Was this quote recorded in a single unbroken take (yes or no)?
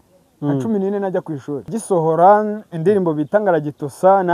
no